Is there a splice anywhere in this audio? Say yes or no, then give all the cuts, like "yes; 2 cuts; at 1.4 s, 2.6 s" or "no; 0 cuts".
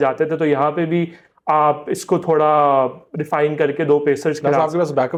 no; 0 cuts